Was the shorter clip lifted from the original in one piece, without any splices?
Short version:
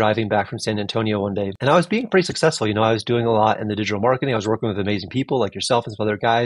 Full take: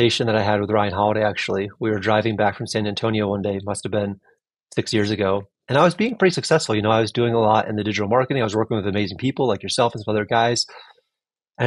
no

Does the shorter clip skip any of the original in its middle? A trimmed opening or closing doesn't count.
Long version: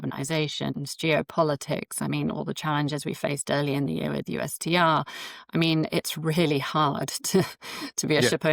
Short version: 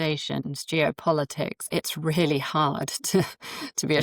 yes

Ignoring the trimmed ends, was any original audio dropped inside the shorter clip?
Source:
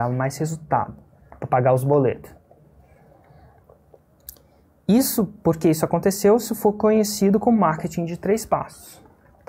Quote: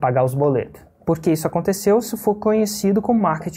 yes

